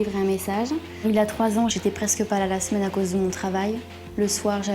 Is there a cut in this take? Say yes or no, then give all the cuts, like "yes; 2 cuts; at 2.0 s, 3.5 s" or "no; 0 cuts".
yes; 1 cut; at 0.9 s